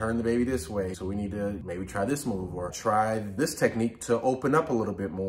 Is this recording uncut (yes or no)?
yes